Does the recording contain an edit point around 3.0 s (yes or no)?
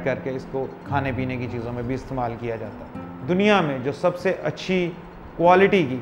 yes